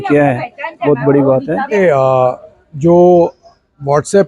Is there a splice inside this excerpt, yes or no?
yes